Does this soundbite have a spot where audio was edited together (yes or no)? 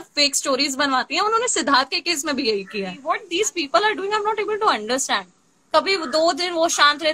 yes